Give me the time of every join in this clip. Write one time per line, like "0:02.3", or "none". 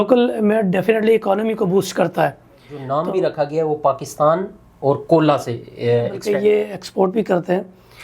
0:02.8
0:06.2